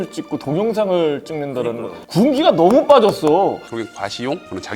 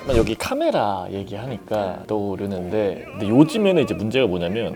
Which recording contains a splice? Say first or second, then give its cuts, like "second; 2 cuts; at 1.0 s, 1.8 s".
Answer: first; 2 cuts; at 1.9 s, 3.7 s